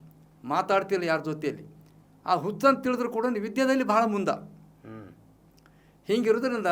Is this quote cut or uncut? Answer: uncut